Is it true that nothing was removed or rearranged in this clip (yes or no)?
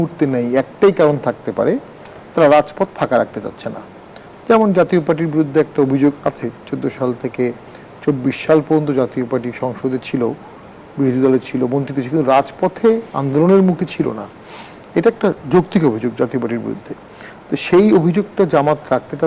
yes